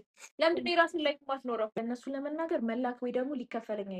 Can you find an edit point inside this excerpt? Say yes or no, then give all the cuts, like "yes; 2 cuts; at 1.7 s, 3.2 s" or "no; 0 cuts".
yes; 1 cut; at 1.7 s